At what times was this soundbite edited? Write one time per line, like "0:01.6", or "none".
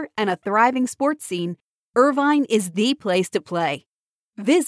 none